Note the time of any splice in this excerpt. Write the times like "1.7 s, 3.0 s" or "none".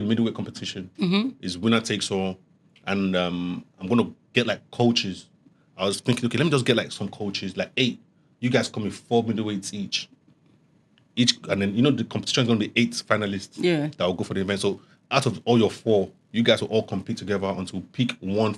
none

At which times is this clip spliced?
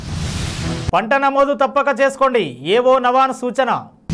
none

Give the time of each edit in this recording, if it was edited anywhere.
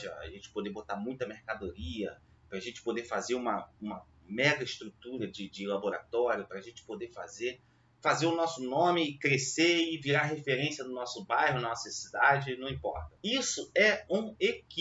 13.1 s

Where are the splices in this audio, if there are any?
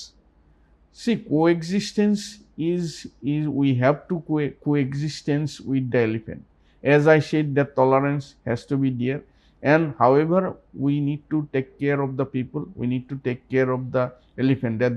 none

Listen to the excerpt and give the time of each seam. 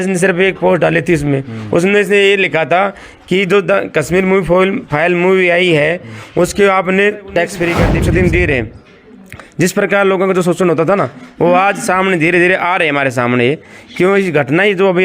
7.9 s

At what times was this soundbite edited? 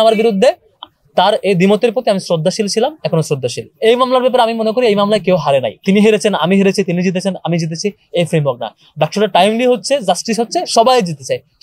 0.8 s, 3.7 s, 5.7 s

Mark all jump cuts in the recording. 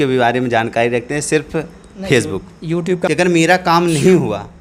3.1 s

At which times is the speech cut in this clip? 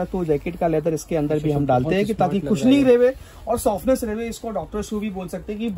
none

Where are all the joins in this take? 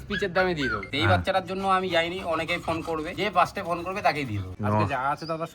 0.9 s, 3.1 s, 4.4 s

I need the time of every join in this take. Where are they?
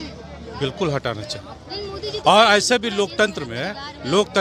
none

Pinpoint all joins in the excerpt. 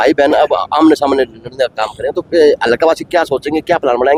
none

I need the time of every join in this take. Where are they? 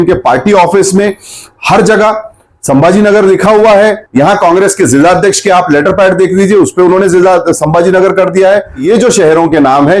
4.0 s, 8.8 s

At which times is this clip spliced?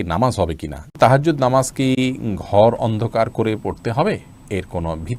0.9 s

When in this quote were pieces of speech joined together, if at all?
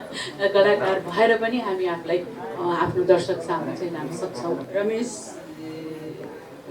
4.6 s

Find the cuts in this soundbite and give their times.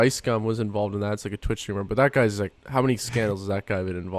2.6 s

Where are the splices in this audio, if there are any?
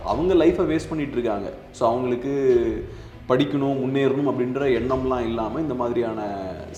none

